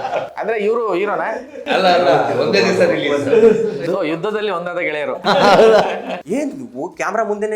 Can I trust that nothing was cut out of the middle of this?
no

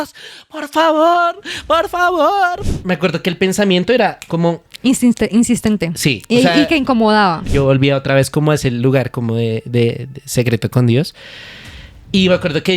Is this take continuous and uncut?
no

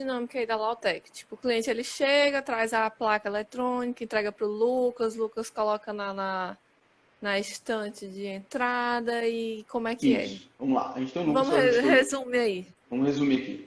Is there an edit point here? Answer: no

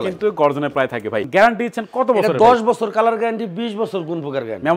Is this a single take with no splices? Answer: no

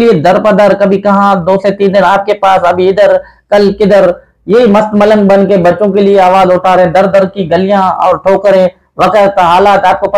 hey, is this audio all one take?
yes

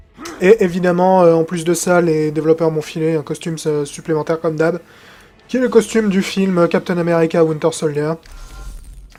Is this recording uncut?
yes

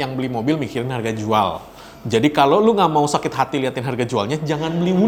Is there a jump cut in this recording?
no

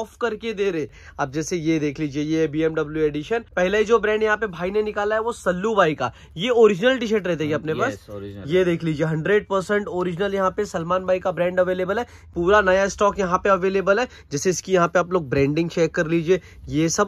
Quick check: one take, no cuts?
no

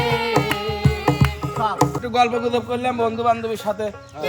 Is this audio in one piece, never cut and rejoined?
no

